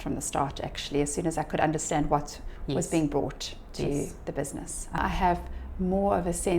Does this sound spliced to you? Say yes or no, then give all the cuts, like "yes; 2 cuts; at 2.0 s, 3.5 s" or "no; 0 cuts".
yes; 1 cut; at 5.0 s